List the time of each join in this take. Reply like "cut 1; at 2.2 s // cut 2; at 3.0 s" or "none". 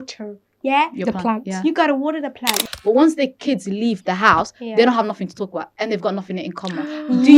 cut 1; at 2.5 s